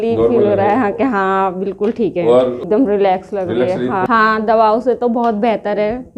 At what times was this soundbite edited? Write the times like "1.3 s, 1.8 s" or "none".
2.6 s, 4.1 s